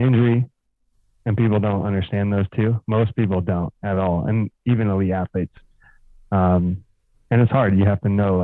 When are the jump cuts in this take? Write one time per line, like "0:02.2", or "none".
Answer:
none

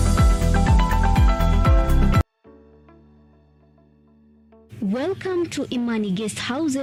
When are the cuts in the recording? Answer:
none

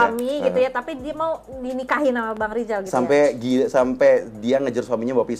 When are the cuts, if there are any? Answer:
none

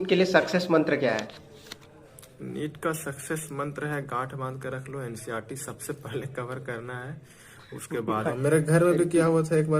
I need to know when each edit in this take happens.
0:08.3

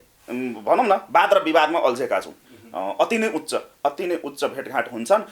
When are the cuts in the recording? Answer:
0:02.3

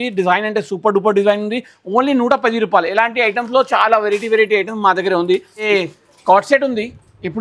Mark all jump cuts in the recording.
0:05.5

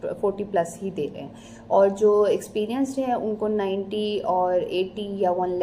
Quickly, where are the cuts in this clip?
none

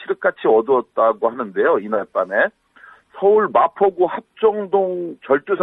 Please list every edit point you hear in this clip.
0:02.8

